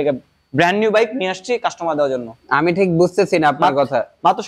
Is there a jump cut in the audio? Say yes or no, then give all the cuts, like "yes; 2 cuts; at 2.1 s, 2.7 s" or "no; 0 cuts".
no; 0 cuts